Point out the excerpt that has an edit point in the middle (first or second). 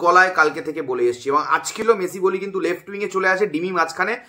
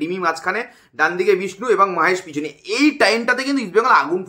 first